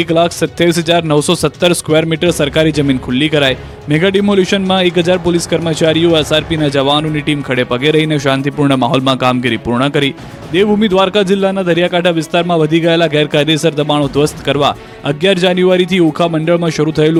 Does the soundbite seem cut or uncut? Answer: uncut